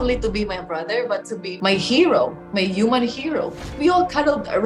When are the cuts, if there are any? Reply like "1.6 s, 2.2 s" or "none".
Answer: 1.5 s, 3.6 s

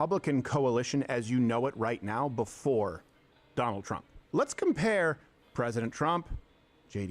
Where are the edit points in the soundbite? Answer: 4.2 s

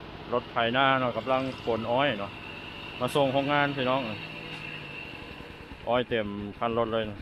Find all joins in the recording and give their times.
none

